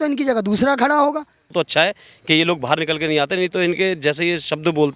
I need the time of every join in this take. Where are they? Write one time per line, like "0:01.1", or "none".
0:01.5